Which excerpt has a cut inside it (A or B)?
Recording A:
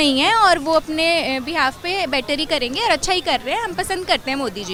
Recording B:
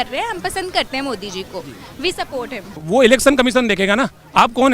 B